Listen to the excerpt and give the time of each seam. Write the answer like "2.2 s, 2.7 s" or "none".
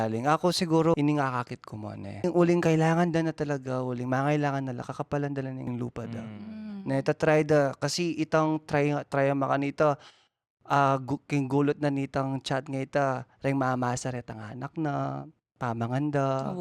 0.9 s, 2.2 s, 5.7 s